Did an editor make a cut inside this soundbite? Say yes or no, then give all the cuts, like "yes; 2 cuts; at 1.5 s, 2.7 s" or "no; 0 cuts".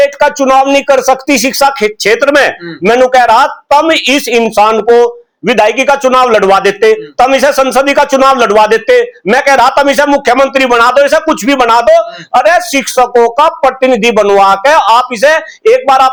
no; 0 cuts